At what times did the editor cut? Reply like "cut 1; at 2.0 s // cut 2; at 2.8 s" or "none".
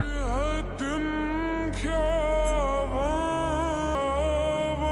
cut 1; at 4.0 s